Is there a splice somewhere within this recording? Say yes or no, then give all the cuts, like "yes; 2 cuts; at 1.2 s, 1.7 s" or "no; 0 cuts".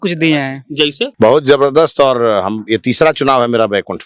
yes; 1 cut; at 1.0 s